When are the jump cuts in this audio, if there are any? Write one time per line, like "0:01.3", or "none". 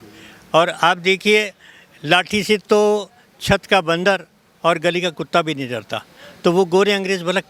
none